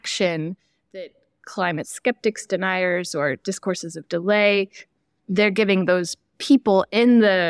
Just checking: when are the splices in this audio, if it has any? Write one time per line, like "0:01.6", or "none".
none